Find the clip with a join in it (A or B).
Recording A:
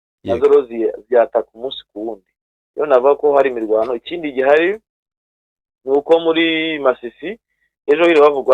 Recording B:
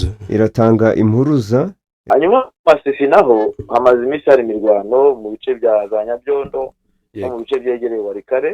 B